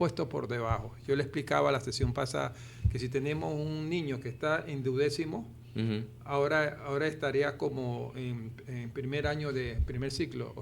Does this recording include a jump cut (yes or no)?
no